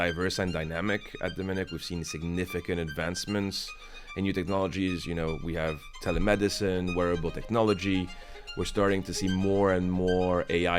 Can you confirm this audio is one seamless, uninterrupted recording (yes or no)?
yes